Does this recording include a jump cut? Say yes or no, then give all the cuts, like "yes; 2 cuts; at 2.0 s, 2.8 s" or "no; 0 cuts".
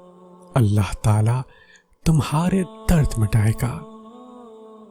yes; 1 cut; at 3.8 s